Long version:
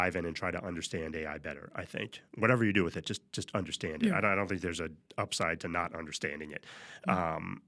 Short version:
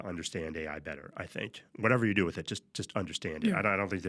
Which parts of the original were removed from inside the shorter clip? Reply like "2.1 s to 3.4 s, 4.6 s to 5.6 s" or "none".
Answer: none